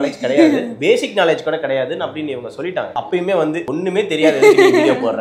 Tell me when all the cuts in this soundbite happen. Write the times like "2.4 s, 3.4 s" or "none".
2.9 s, 3.6 s

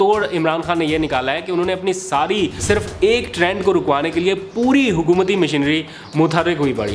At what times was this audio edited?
2.6 s

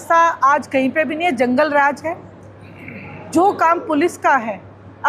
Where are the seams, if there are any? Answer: none

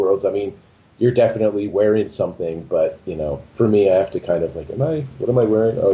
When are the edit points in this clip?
none

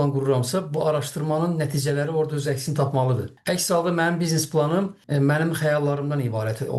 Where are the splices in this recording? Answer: 3.3 s, 5.0 s

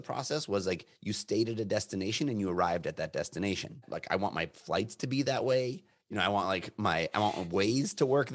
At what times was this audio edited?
3.9 s

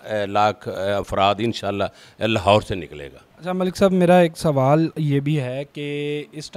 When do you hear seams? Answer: none

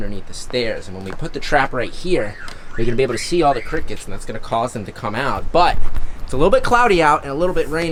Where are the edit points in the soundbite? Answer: none

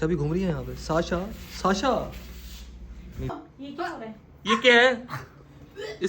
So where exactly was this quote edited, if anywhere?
3.3 s

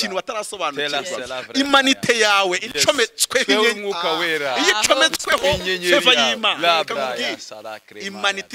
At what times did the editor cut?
none

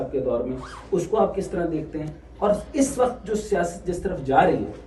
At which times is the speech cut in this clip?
none

